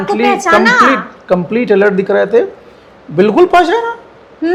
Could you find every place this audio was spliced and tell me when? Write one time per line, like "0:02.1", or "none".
none